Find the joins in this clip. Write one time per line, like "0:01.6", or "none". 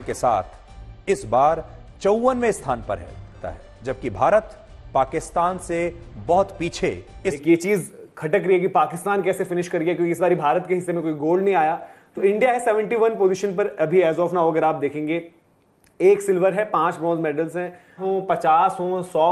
0:03.3
0:07.4
0:18.0